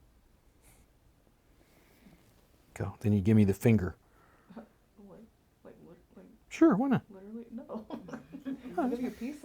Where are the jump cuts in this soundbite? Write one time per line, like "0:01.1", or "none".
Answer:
0:02.9